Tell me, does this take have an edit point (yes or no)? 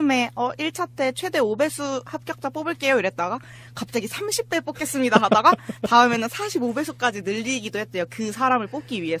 yes